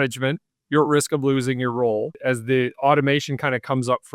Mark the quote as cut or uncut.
cut